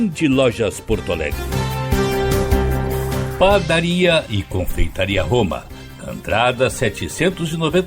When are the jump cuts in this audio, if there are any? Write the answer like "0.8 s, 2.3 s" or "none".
1.3 s, 2.2 s, 3.1 s